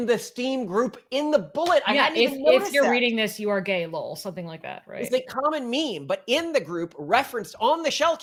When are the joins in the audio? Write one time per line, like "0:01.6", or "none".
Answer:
none